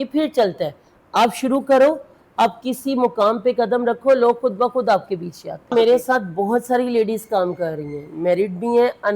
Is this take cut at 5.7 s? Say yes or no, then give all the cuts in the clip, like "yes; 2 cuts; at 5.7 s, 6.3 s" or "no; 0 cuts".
yes; 1 cut; at 5.7 s